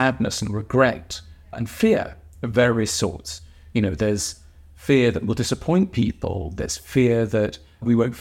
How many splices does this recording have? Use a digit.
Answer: 0